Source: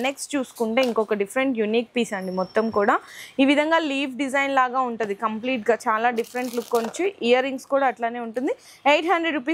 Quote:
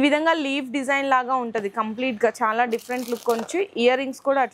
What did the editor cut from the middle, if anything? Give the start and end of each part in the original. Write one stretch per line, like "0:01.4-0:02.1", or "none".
none